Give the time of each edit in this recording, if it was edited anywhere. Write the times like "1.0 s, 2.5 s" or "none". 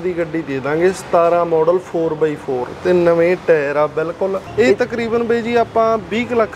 4.4 s

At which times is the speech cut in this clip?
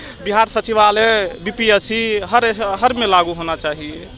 none

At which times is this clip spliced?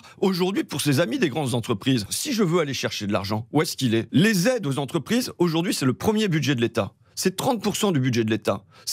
2.1 s, 4.1 s

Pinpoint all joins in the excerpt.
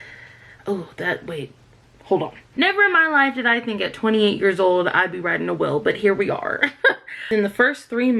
2.4 s, 7.3 s

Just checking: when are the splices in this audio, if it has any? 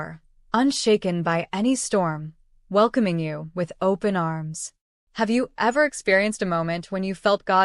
4.4 s, 6.3 s

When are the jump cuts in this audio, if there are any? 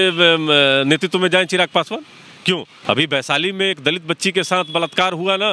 2.7 s

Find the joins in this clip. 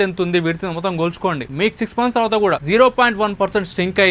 1.5 s, 2.6 s

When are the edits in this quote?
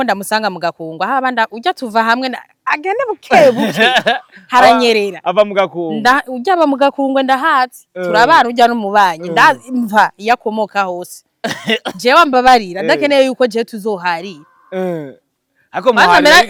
none

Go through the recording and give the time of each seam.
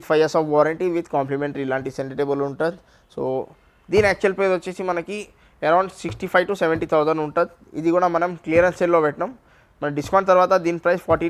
none

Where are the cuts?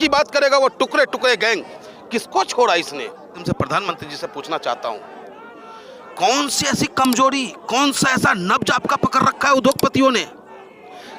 3.4 s

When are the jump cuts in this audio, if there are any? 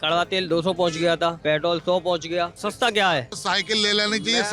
1.4 s, 2.6 s, 3.4 s

